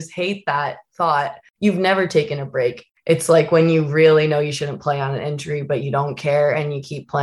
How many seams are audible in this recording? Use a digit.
2